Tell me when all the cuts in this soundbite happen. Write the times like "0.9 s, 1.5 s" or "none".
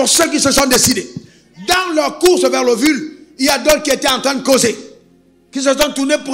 none